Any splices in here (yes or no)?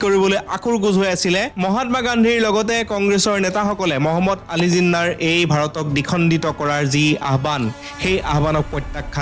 no